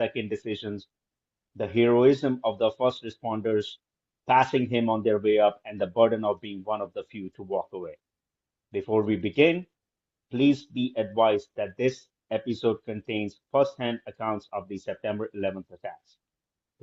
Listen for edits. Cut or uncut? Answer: uncut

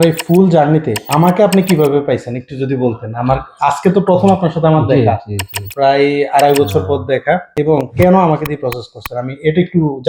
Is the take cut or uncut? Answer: uncut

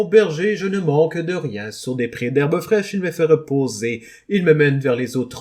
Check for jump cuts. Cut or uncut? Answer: uncut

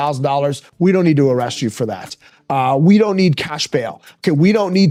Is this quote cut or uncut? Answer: uncut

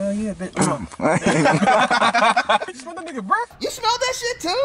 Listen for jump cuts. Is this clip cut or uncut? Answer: cut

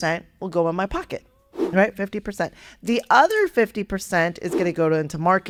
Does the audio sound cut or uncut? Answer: uncut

